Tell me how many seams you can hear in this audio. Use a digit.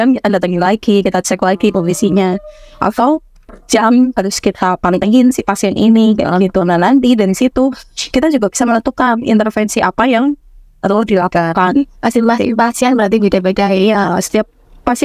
0